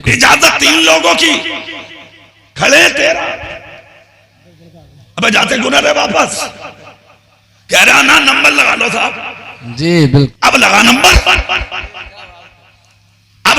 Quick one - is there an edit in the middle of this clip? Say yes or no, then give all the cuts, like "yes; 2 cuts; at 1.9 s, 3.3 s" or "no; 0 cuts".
yes; 1 cut; at 10.3 s